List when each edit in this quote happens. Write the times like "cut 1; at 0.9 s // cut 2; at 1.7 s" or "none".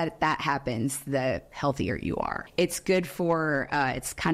none